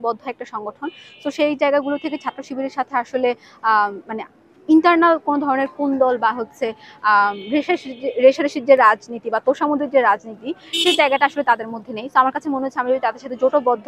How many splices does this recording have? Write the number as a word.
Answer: zero